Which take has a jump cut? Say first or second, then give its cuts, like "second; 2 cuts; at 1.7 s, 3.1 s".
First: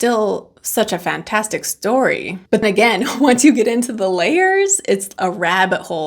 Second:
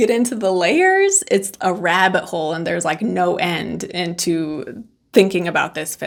first; 1 cut; at 2.6 s